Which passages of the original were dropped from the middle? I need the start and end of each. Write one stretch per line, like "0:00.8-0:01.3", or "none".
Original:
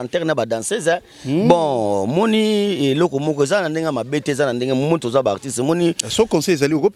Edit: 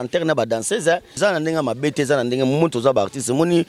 0:01.2-0:03.5